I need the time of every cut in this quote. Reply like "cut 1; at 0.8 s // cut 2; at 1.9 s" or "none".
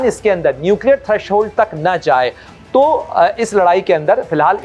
cut 1; at 2.4 s